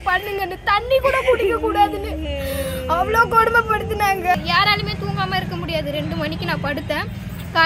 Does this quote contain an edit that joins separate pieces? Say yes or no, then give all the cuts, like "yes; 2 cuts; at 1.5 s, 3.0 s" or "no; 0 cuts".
yes; 1 cut; at 4.3 s